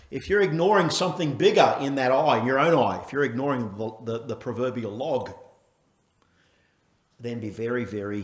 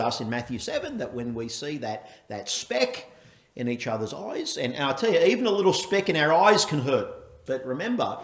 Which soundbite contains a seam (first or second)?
second